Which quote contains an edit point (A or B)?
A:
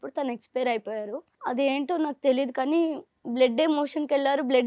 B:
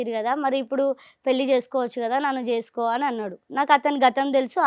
A